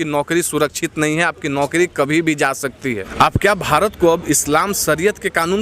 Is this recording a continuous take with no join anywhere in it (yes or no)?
no